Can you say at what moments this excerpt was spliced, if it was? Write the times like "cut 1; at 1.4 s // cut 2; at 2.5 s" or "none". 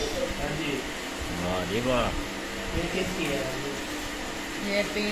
none